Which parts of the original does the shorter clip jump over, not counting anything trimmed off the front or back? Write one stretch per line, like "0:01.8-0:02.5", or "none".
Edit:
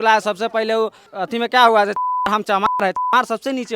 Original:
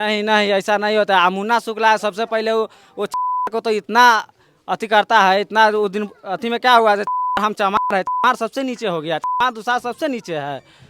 0:02.9-0:06.2